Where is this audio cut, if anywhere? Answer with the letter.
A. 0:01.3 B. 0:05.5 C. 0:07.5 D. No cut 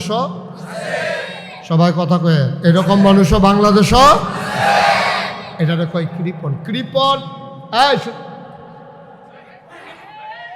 D